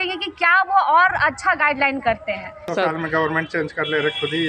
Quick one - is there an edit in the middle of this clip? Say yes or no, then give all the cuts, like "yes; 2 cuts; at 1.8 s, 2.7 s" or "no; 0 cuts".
yes; 1 cut; at 2.7 s